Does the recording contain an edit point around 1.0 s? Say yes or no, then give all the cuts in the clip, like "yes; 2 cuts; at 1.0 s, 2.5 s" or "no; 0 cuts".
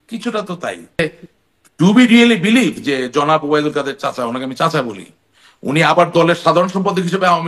yes; 1 cut; at 1.0 s